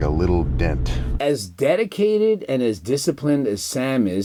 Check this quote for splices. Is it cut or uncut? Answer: uncut